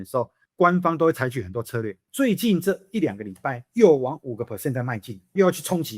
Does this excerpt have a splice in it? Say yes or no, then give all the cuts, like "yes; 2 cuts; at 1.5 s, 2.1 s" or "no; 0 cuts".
yes; 1 cut; at 2.0 s